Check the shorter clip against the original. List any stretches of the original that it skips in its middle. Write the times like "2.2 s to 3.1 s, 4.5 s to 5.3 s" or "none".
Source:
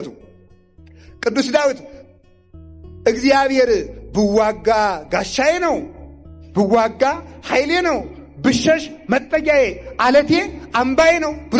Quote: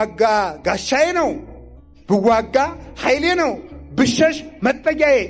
none